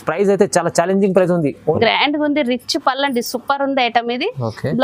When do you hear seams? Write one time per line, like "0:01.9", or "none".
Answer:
0:01.8